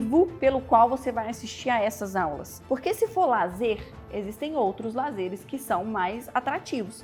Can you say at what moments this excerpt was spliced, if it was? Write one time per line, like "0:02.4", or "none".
none